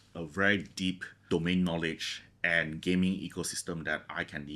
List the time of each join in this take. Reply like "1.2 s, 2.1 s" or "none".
1.1 s